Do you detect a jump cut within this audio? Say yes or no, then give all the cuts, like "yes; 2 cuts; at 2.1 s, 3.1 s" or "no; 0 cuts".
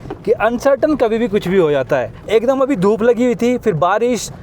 yes; 1 cut; at 2.2 s